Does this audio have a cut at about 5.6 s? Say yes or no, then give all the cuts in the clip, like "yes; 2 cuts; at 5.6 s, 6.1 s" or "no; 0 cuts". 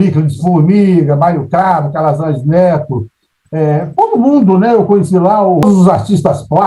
yes; 1 cut; at 5.6 s